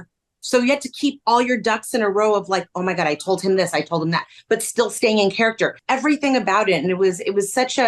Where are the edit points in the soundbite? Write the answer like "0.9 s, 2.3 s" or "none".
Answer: 5.8 s